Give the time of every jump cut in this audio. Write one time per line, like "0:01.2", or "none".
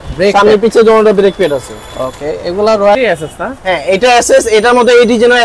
0:03.0